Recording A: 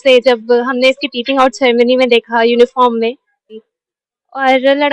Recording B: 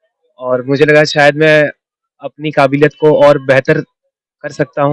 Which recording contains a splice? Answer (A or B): A